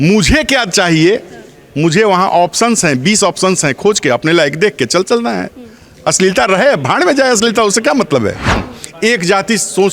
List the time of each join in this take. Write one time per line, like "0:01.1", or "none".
0:08.7